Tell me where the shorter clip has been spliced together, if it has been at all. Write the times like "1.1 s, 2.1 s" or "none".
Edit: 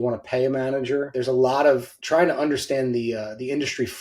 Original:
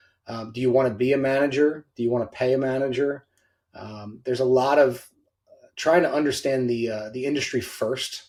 1.1 s, 1.9 s